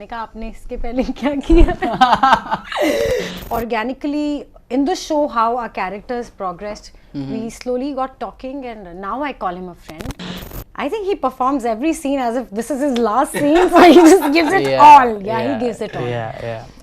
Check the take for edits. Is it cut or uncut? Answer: cut